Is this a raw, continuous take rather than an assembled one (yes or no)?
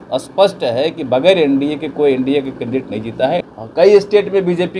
no